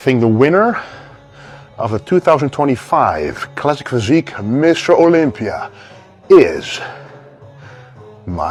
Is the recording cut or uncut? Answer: uncut